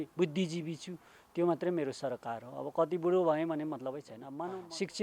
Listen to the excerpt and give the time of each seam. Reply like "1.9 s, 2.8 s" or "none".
4.1 s